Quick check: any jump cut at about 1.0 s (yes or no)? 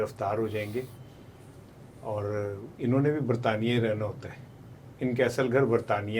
no